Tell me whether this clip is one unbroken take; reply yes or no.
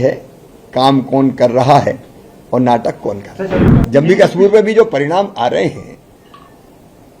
no